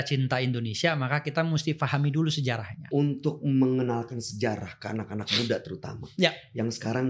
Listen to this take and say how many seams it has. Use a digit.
1